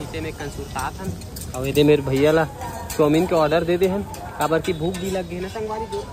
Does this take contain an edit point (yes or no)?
no